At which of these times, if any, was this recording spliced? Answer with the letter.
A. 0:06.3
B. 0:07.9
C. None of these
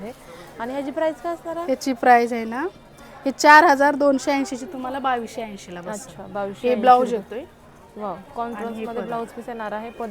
C